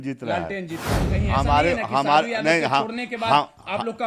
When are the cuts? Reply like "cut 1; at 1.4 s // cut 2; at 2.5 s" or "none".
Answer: cut 1; at 1.1 s